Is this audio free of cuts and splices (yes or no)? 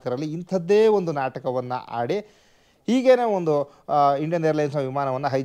yes